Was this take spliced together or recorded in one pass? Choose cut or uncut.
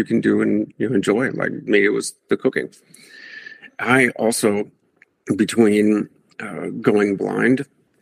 uncut